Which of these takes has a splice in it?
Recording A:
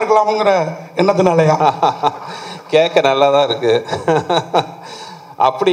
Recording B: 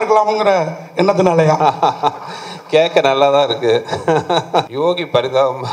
B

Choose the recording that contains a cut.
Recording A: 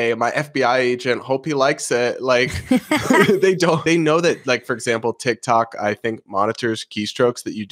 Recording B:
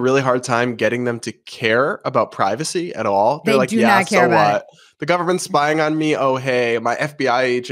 A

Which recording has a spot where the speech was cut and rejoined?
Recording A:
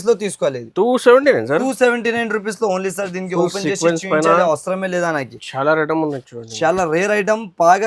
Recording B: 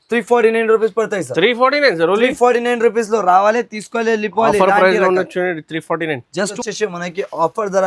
B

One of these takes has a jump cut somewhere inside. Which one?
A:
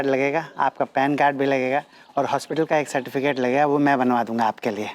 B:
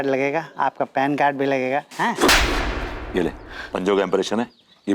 B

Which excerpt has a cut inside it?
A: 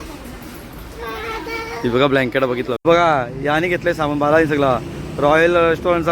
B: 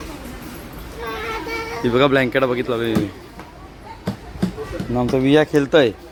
A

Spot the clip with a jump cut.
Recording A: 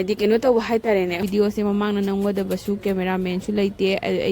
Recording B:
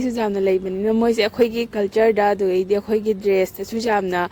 A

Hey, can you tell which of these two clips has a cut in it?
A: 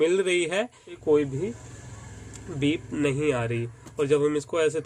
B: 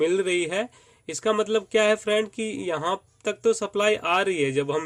A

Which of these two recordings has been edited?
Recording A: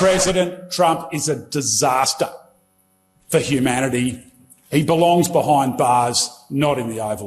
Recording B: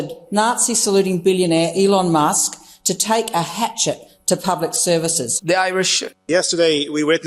B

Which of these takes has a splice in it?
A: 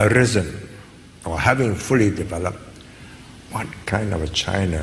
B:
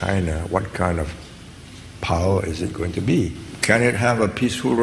B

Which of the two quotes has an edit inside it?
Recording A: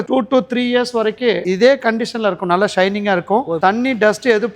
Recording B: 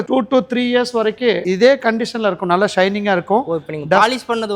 A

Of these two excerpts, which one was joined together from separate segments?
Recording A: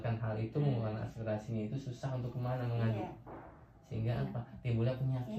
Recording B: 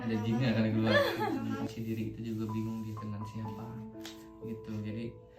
B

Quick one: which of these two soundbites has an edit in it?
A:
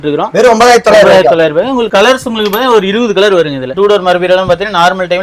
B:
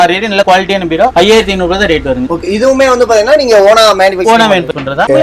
A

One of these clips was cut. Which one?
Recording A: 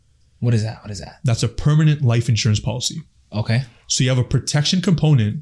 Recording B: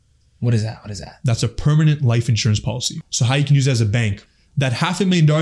B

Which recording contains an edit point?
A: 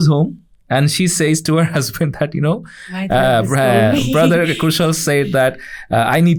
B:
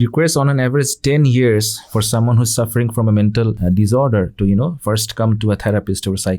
B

